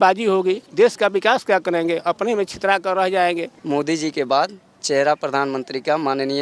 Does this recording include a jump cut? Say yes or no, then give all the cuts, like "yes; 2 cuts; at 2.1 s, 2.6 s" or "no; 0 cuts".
yes; 2 cuts; at 3.5 s, 4.8 s